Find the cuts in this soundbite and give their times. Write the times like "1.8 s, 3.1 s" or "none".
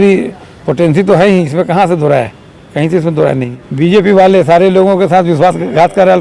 3.5 s